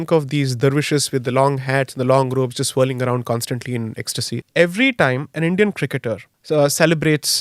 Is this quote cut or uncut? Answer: cut